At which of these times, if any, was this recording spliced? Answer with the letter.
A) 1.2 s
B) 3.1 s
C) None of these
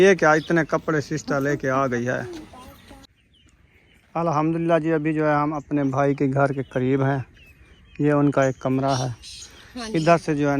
B